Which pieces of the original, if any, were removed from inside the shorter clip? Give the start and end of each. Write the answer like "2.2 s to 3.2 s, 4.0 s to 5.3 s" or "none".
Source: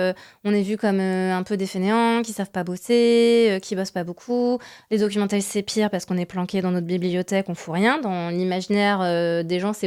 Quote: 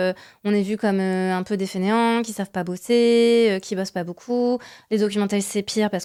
none